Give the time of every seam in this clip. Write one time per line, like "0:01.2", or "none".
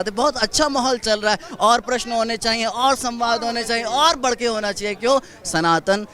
none